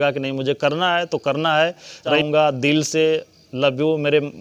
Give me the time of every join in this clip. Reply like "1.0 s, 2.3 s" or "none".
2.2 s